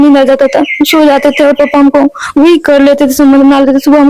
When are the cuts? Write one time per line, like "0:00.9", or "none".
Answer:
none